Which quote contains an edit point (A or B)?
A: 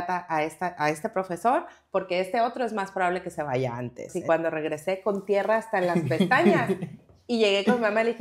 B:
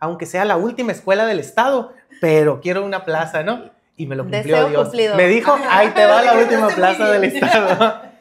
A